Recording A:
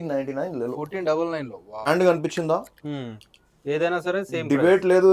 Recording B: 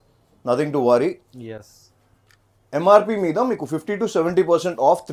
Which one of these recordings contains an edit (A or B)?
A